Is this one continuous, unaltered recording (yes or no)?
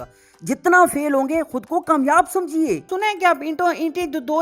no